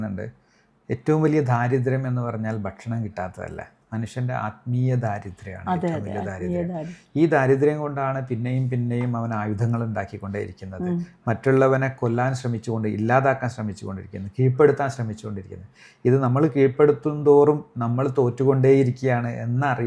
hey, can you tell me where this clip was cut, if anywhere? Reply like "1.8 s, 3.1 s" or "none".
none